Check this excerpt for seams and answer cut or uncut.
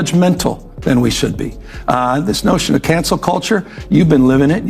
cut